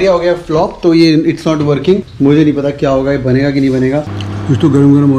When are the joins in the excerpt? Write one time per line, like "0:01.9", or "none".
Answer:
0:02.1
0:04.1